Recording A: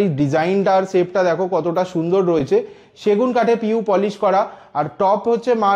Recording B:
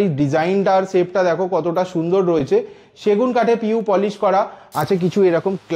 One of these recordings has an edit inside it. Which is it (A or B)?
B